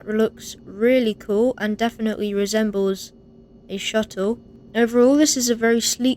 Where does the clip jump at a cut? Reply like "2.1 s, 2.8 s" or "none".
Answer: 4.5 s